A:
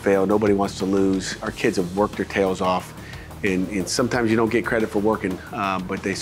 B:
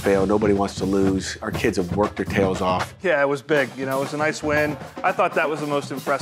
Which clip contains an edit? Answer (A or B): B